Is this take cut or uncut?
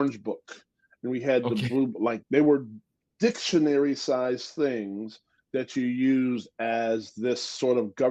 cut